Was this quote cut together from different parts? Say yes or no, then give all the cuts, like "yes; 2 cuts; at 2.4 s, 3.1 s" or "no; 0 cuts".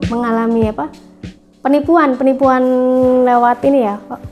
no; 0 cuts